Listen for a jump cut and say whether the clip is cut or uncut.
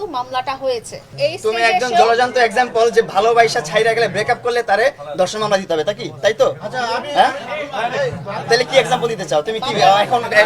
cut